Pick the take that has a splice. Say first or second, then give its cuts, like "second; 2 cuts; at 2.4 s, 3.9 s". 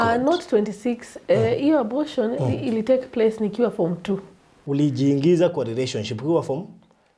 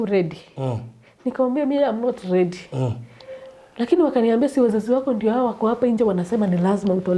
first; 1 cut; at 4.6 s